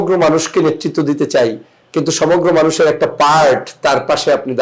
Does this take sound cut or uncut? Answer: uncut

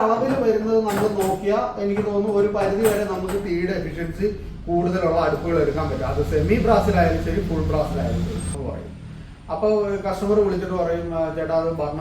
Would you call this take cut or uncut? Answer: cut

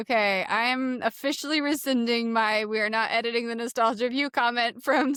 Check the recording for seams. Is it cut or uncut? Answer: uncut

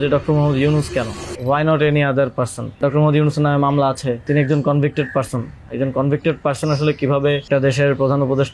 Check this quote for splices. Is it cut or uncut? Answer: cut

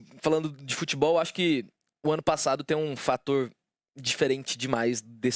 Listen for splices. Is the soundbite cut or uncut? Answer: uncut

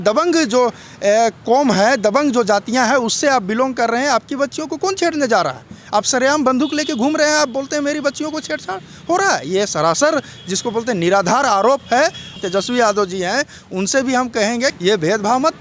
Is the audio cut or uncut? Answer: cut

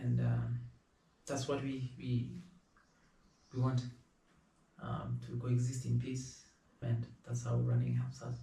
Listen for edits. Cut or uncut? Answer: uncut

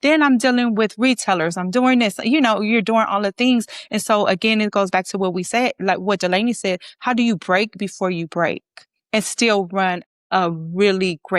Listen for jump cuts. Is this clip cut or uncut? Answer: cut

